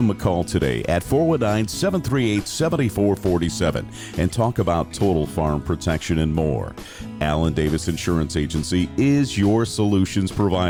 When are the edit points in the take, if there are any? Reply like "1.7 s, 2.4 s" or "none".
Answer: none